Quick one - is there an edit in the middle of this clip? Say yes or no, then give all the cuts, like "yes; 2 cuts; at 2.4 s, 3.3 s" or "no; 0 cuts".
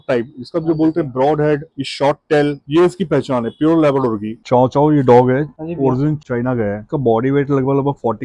yes; 2 cuts; at 4.4 s, 6.9 s